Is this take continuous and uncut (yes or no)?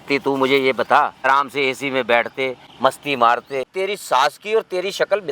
no